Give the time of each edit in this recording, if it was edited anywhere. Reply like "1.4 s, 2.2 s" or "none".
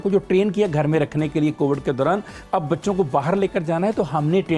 none